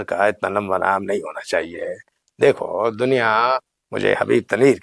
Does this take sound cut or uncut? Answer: uncut